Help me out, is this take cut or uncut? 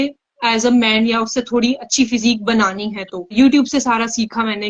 cut